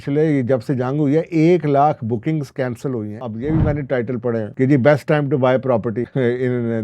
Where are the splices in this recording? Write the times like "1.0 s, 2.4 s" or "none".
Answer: 3.2 s, 4.5 s, 6.1 s